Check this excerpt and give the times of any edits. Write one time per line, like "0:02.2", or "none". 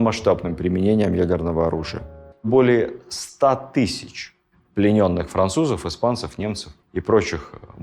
0:02.5